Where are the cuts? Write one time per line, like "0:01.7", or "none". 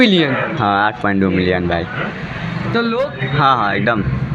0:03.1